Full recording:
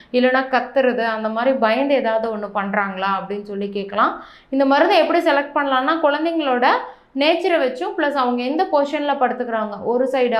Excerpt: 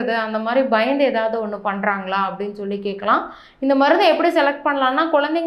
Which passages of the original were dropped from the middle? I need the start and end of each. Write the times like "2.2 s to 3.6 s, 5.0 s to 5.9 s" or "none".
none